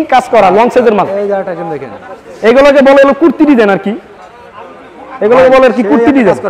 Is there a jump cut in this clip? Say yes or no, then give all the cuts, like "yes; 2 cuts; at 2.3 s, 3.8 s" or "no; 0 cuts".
no; 0 cuts